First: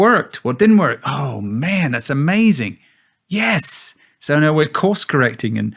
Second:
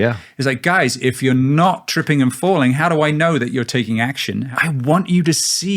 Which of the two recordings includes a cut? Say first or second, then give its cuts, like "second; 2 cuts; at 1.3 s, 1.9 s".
second; 1 cut; at 4.5 s